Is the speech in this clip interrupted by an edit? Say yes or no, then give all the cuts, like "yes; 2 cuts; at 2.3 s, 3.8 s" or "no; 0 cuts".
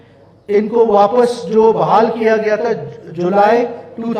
no; 0 cuts